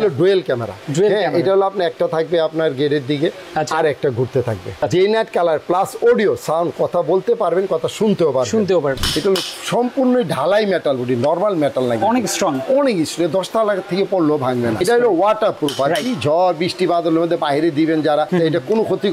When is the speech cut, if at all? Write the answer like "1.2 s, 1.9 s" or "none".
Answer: 4.8 s, 9.0 s, 14.8 s, 18.3 s